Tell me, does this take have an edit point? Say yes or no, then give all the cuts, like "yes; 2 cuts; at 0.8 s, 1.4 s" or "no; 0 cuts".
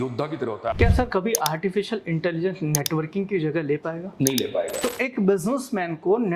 yes; 2 cuts; at 0.7 s, 4.8 s